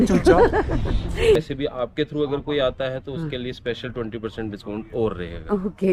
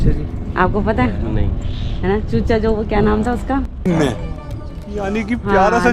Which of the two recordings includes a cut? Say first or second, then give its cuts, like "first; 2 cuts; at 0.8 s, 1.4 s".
first; 1 cut; at 1.4 s